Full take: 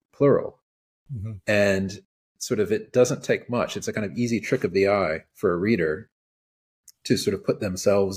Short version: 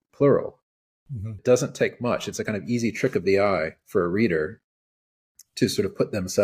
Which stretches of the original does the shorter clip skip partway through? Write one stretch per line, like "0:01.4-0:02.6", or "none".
0:01.4-0:02.9